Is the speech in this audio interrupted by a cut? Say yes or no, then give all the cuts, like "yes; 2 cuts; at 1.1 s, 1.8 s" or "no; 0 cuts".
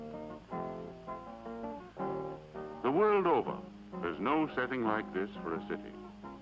yes; 1 cut; at 1.8 s